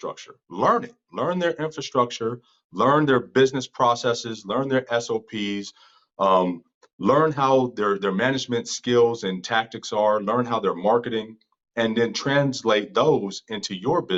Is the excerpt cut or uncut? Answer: uncut